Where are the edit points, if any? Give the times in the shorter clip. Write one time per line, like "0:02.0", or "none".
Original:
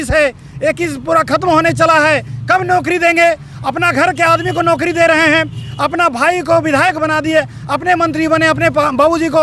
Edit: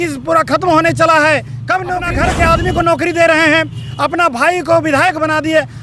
0:02.0